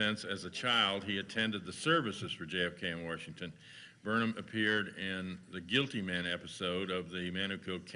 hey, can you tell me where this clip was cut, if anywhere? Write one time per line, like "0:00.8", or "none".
none